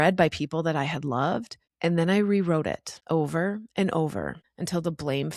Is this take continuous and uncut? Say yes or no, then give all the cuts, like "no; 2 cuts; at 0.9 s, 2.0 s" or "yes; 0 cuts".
yes; 0 cuts